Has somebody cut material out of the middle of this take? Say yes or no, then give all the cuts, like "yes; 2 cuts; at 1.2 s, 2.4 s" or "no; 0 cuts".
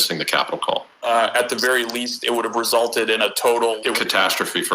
yes; 2 cuts; at 1.0 s, 3.8 s